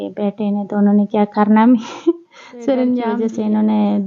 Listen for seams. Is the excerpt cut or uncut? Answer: cut